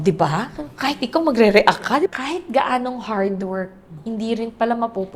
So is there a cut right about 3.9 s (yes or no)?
yes